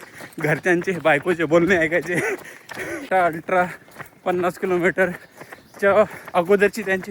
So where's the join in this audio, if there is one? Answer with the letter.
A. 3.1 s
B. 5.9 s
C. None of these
A